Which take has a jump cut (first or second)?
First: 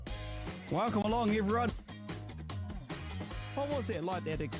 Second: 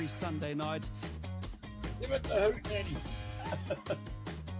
first